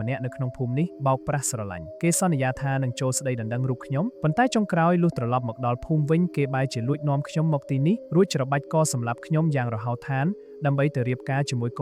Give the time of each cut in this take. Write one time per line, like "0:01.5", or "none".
0:01.0
0:01.8
0:04.2
0:08.0